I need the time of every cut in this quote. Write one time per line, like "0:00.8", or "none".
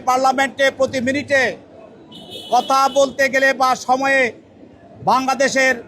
none